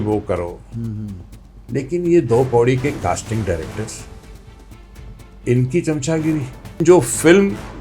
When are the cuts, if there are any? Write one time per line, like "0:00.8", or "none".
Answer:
0:06.8